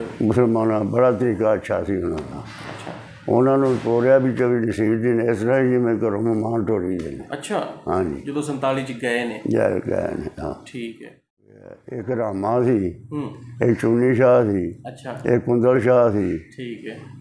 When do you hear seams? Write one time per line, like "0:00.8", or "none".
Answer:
0:11.9